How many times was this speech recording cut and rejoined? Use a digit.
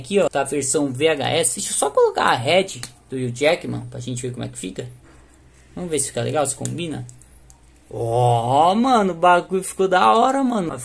0